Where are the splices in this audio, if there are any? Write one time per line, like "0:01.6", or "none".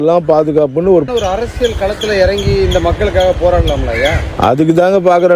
0:01.1